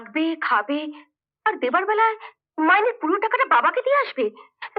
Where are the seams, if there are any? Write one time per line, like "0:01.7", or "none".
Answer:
none